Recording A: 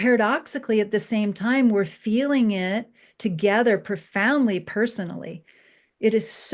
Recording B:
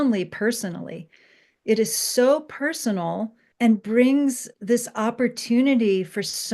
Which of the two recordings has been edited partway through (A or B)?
B